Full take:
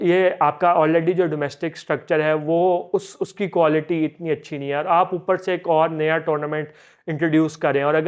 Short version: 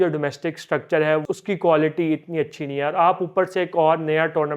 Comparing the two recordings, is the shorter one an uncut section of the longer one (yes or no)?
no